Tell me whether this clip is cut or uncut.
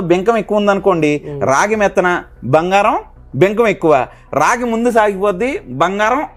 uncut